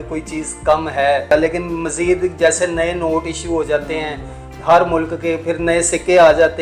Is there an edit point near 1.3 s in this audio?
yes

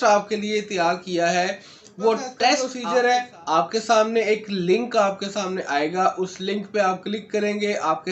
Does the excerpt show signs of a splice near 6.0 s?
no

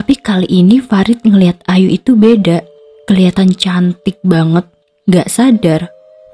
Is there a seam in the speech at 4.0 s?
no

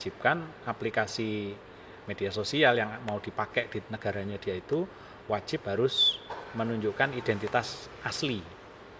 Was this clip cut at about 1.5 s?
no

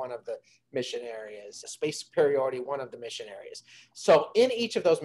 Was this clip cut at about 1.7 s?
yes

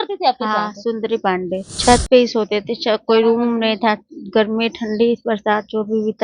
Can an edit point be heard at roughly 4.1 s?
no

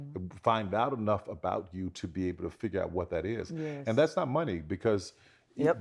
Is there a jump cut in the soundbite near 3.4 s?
no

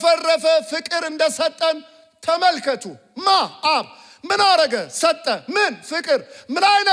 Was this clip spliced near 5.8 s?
no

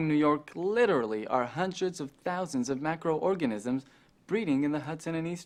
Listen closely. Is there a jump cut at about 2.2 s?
no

